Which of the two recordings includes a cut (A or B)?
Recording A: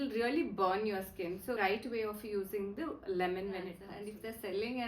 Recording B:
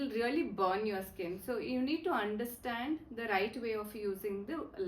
A